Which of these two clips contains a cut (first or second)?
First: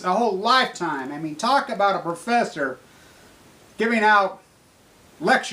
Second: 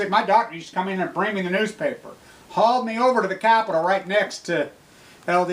first